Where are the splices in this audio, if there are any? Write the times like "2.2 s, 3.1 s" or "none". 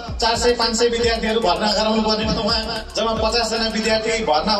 none